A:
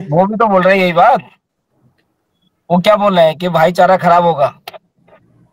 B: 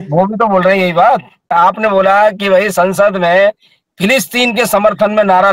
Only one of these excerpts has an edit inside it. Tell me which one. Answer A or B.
B